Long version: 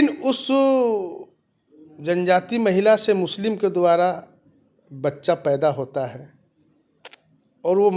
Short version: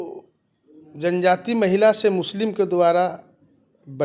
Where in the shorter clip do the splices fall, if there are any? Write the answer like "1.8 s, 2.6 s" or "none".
none